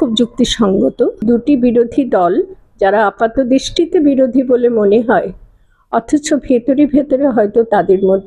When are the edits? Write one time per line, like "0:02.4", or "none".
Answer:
0:01.2